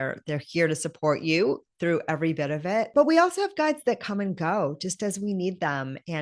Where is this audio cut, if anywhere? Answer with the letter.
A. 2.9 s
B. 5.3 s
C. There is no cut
A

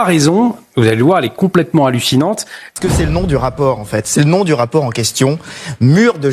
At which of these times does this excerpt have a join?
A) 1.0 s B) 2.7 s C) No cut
B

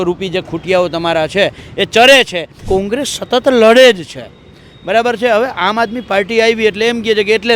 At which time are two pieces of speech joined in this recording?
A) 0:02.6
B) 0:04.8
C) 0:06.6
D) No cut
A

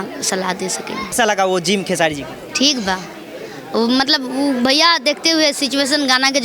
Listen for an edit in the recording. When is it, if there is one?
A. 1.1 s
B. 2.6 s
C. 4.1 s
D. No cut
A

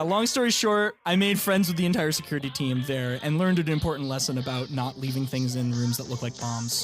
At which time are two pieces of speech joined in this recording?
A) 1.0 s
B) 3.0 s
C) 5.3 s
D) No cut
A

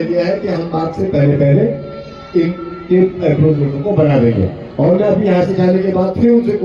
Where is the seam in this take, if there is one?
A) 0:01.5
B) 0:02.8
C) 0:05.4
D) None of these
D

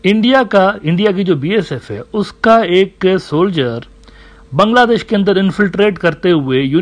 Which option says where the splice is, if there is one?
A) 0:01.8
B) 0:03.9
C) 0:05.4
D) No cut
D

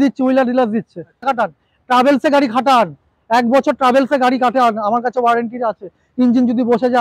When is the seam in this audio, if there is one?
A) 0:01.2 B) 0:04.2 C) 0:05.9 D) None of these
A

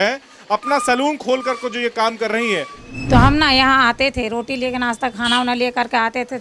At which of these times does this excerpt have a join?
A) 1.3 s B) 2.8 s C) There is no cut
B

